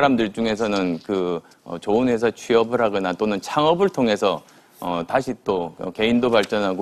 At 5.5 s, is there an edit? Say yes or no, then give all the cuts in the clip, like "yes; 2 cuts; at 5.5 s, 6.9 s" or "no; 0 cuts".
yes; 1 cut; at 5.5 s